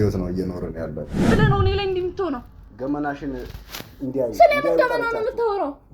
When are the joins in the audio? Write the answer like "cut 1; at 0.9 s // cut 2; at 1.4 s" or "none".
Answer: cut 1; at 1.3 s